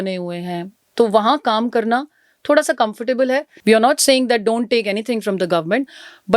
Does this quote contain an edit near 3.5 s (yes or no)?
yes